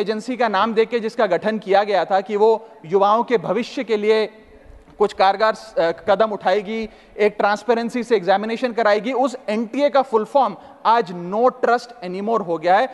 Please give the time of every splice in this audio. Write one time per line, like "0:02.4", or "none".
none